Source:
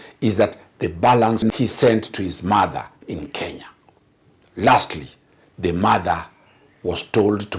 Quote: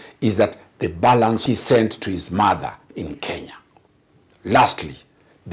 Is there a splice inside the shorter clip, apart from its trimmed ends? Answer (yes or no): yes